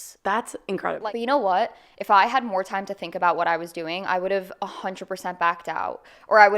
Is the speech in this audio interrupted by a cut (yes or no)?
yes